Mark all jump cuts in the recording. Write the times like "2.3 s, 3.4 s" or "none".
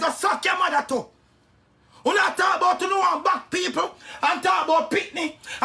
none